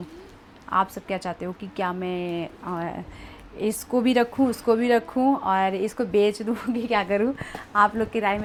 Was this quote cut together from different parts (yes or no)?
no